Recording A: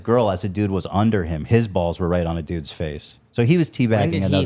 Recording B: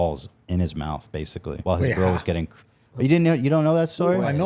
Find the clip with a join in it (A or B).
B